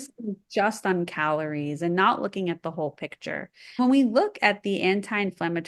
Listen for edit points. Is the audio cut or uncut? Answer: cut